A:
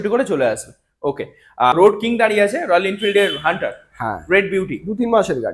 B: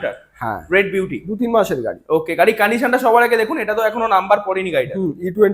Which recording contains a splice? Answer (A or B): A